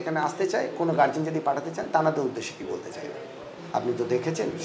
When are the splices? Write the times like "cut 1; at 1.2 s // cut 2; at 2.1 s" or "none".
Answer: cut 1; at 3.5 s

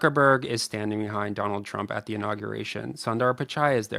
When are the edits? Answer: none

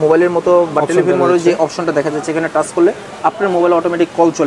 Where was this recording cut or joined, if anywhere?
none

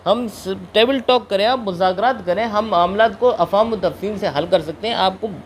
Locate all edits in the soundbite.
none

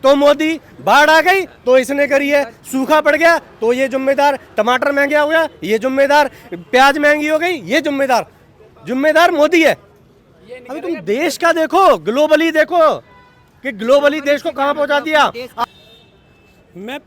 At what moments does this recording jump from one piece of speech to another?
cut 1; at 15.8 s

